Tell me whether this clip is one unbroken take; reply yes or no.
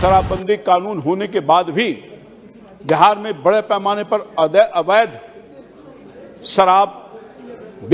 yes